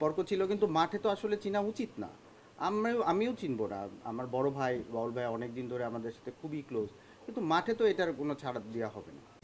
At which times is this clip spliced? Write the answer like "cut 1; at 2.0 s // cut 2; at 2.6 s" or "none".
none